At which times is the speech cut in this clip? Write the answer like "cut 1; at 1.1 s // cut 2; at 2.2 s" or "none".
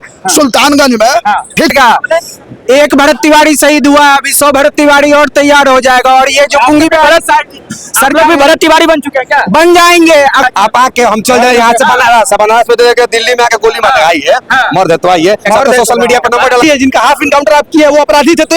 cut 1; at 1.7 s // cut 2; at 10.4 s // cut 3; at 16.6 s